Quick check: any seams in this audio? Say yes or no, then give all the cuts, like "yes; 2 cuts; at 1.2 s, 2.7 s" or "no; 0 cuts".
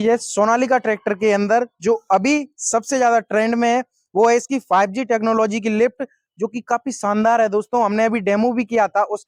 no; 0 cuts